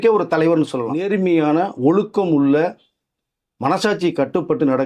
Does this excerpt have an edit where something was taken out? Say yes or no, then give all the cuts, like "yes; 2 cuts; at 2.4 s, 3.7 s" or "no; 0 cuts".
yes; 1 cut; at 0.9 s